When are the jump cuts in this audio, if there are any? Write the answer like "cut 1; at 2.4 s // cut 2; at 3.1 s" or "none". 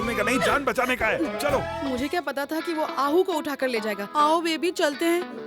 cut 1; at 1.7 s